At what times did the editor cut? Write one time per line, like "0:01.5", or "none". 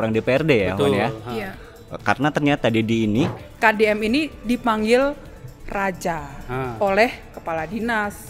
0:03.4

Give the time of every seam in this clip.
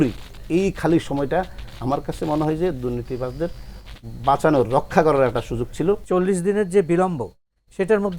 0:06.0

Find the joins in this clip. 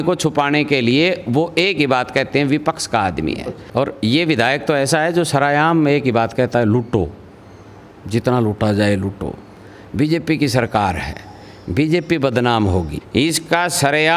0:03.6
0:13.0

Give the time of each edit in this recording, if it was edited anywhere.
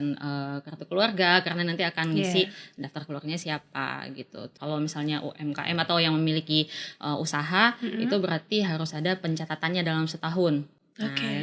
0:04.6

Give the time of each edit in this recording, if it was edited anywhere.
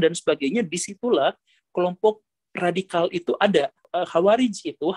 0:03.8

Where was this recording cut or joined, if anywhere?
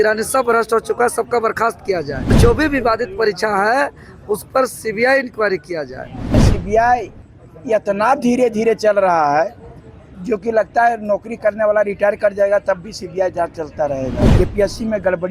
0:02.4
0:06.4
0:14.2

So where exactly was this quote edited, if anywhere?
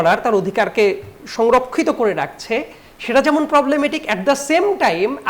none

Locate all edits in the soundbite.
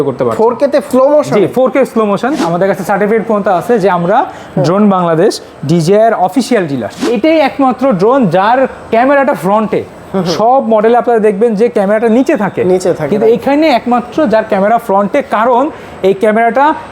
0:02.5
0:07.0

